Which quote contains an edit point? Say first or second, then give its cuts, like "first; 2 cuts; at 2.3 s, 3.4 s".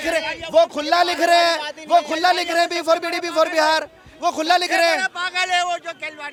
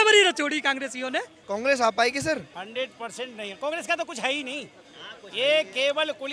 second; 2 cuts; at 1.4 s, 2.6 s